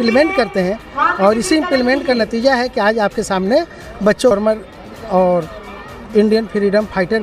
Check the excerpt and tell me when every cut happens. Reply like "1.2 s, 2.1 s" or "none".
4.3 s